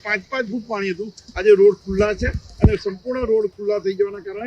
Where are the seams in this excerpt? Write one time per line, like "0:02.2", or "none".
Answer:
none